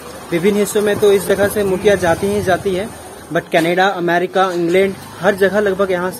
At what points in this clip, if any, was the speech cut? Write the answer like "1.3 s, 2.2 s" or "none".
none